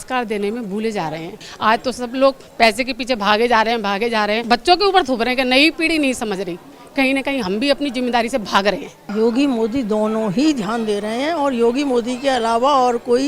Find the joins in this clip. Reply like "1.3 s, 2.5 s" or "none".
1.4 s, 4.4 s, 8.9 s